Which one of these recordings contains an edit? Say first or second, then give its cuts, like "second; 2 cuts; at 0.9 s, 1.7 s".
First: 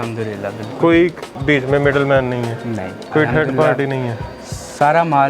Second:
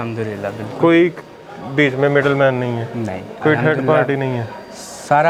first; 1 cut; at 1.3 s